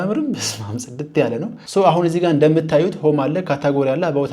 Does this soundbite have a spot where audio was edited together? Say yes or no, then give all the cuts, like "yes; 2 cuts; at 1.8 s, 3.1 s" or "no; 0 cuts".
yes; 1 cut; at 1.7 s